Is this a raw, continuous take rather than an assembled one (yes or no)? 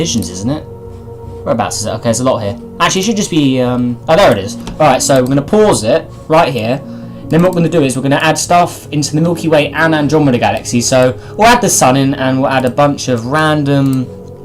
yes